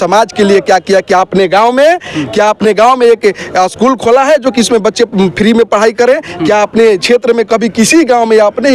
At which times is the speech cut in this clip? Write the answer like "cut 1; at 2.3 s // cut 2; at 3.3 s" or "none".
none